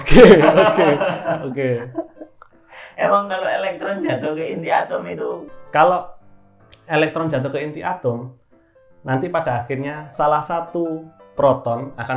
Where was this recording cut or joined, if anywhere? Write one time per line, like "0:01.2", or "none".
0:05.5